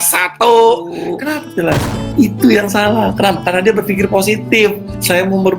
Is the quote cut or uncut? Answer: cut